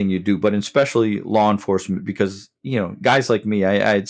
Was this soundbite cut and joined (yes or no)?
no